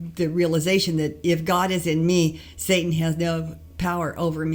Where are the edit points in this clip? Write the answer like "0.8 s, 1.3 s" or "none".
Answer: none

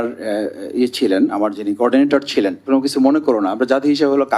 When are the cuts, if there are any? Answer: 2.6 s

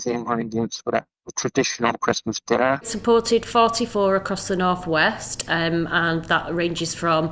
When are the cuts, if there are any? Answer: 2.9 s

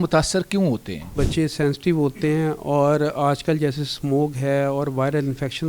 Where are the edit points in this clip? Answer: 1.1 s

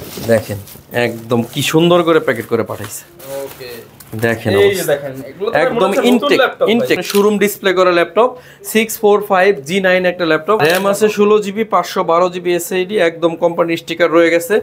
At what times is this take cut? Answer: 7.0 s, 10.6 s

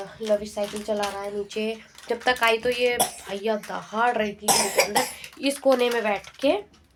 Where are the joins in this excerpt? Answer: none

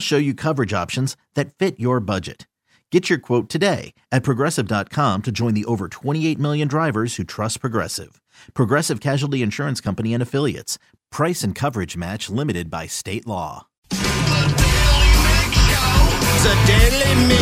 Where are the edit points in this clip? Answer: 13.8 s

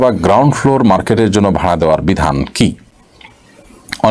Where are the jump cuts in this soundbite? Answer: none

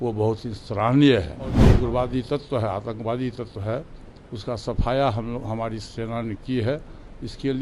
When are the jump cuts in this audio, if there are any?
1.6 s

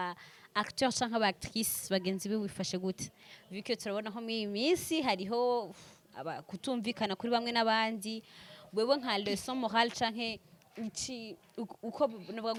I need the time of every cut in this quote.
none

